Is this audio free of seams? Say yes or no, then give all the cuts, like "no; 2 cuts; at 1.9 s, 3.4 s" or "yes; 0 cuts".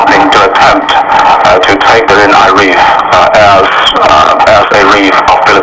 yes; 0 cuts